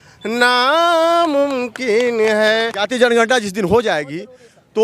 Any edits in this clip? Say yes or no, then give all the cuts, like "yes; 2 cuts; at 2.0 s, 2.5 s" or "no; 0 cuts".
yes; 1 cut; at 2.8 s